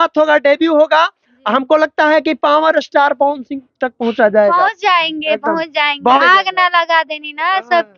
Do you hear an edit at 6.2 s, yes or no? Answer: yes